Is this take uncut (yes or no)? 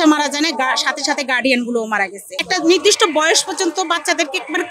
no